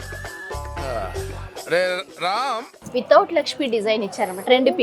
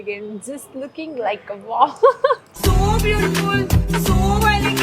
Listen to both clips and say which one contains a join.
first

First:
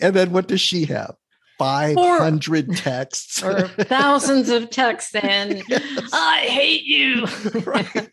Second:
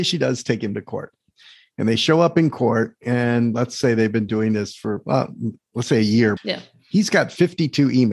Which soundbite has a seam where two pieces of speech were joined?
second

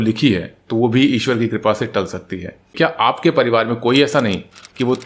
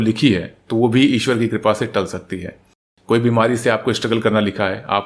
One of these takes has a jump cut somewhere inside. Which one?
first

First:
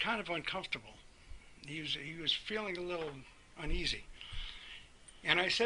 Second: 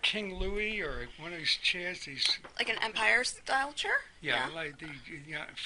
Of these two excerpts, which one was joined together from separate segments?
first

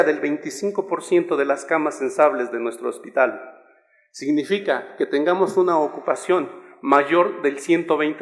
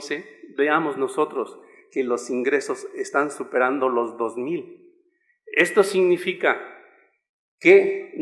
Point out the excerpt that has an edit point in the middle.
first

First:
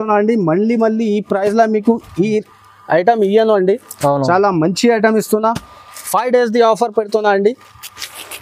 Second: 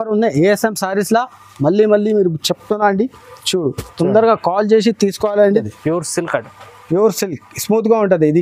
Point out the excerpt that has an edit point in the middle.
second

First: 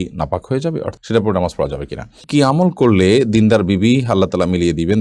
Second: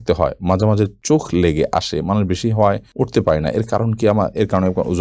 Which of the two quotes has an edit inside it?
first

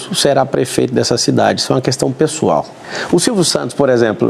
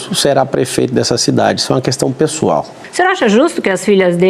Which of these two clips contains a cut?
second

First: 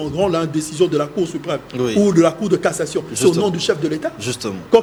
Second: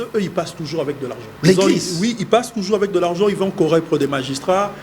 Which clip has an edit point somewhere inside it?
second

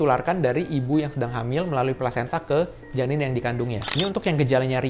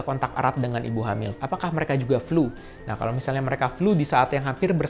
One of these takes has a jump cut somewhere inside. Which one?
first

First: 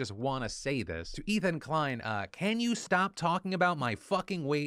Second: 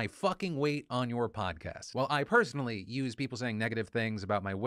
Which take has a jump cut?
second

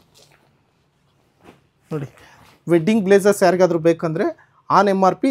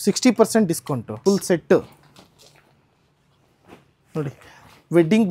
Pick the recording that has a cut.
second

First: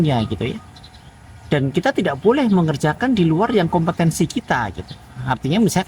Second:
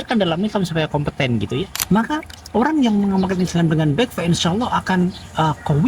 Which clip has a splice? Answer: second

